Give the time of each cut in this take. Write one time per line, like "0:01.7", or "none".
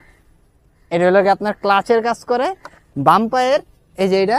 none